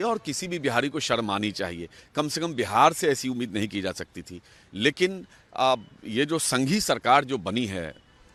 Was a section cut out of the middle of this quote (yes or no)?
no